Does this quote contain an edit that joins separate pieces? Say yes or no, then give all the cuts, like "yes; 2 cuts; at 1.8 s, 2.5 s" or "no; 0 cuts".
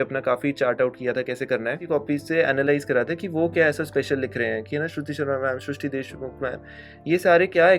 yes; 1 cut; at 1.8 s